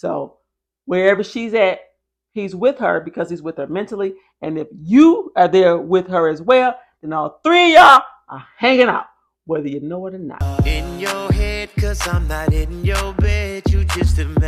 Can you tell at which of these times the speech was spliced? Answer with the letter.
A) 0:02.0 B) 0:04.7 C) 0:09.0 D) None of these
D